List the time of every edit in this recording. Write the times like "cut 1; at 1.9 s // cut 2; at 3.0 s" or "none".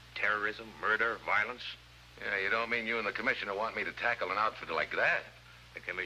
cut 1; at 2.7 s